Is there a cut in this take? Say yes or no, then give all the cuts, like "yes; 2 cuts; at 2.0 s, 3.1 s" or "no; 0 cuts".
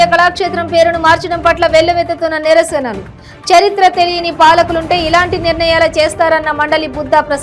no; 0 cuts